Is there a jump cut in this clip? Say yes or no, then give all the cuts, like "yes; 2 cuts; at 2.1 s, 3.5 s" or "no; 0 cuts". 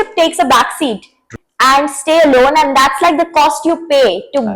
yes; 1 cut; at 1.3 s